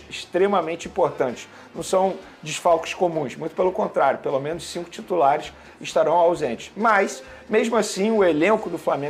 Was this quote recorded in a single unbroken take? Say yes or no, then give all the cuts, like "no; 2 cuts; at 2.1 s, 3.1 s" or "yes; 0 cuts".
yes; 0 cuts